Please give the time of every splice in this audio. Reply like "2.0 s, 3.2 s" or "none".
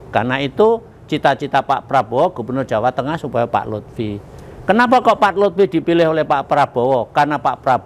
none